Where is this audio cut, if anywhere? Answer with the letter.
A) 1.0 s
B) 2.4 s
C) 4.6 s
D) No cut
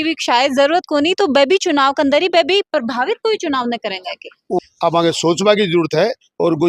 C